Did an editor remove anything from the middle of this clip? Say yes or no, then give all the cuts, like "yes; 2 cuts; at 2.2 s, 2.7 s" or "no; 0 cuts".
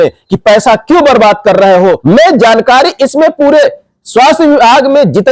yes; 1 cut; at 2.0 s